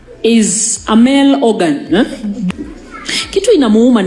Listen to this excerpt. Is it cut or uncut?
cut